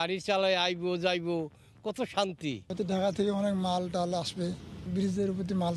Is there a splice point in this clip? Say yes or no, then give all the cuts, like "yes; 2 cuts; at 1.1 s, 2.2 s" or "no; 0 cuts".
yes; 2 cuts; at 2.6 s, 4.8 s